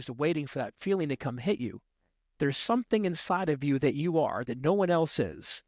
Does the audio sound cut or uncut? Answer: cut